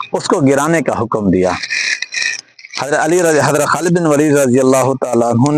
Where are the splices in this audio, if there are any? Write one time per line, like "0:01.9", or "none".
none